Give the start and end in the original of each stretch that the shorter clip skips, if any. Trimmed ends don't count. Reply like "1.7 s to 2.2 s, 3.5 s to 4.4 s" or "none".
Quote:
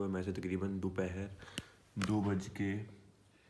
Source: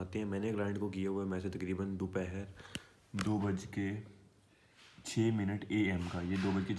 none